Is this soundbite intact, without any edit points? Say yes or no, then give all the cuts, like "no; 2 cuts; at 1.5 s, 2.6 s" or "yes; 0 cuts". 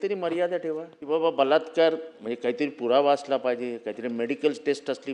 no; 1 cut; at 0.9 s